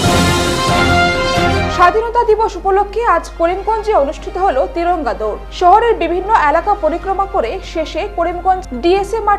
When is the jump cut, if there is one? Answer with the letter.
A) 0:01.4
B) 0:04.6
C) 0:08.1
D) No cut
A